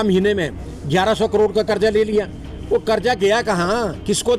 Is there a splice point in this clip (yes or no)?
no